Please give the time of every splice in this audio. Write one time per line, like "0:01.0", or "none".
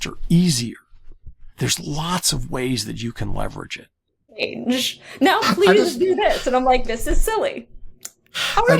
0:04.4